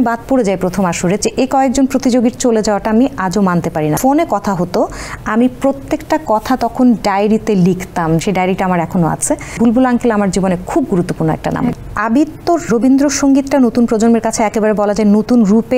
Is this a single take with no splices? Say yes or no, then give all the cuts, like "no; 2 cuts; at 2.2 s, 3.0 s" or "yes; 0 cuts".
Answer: no; 6 cuts; at 1.2 s, 4.0 s, 8.2 s, 9.6 s, 11.8 s, 12.7 s